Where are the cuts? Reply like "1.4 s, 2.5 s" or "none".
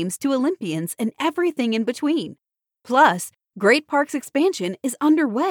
none